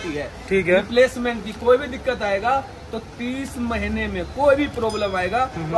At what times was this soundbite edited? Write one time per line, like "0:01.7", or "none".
none